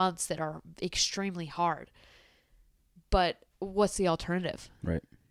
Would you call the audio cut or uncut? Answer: uncut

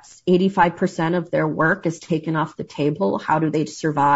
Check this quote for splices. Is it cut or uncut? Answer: uncut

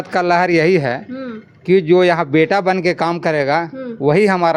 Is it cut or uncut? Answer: uncut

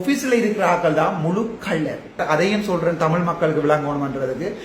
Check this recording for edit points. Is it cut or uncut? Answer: cut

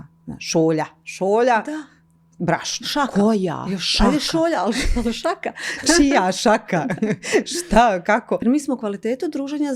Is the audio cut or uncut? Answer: cut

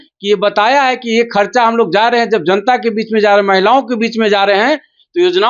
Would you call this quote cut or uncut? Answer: uncut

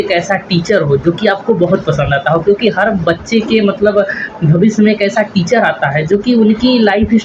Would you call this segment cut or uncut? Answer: uncut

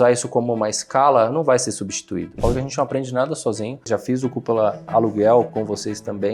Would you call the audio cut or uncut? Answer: cut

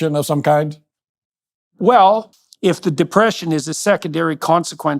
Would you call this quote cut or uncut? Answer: cut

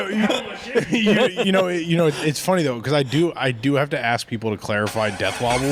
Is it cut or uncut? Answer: uncut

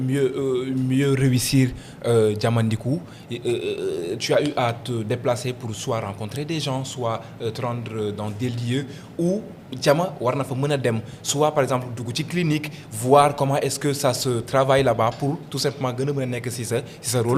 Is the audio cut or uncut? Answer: uncut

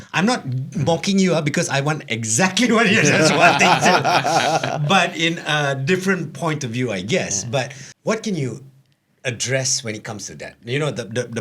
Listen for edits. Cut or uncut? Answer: cut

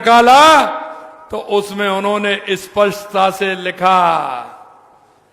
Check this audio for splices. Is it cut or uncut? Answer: uncut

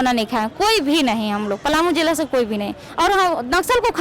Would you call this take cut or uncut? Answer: cut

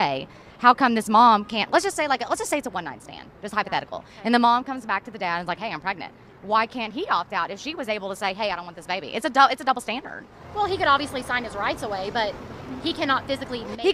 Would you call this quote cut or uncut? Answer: uncut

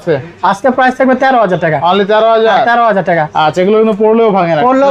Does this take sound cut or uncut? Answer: uncut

